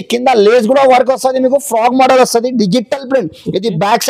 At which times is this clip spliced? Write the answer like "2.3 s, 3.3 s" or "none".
none